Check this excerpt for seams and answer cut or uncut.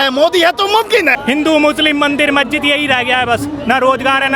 cut